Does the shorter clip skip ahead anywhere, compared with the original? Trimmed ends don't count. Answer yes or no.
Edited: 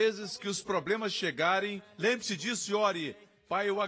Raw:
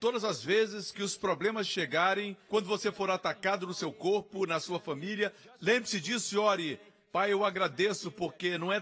yes